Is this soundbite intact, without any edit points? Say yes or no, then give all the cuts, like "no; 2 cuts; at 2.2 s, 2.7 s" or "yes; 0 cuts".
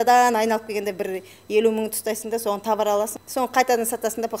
no; 1 cut; at 3.2 s